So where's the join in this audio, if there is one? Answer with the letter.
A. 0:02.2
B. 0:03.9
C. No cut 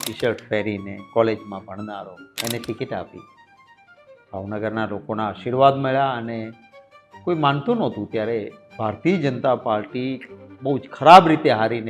A